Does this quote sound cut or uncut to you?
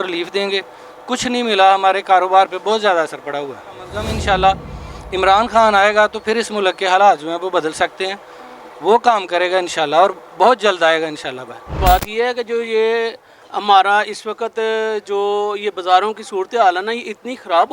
cut